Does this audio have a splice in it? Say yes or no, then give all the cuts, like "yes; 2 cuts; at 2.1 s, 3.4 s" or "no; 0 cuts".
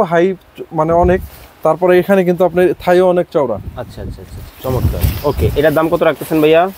no; 0 cuts